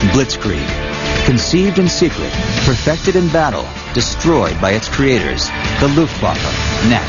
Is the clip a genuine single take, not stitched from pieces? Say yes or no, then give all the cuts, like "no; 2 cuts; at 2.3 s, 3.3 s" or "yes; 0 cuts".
yes; 0 cuts